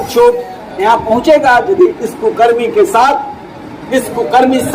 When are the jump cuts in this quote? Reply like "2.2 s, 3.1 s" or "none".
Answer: none